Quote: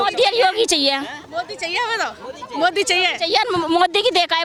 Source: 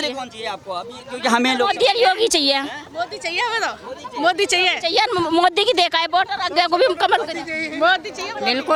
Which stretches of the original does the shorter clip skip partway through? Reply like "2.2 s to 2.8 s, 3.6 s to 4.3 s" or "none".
none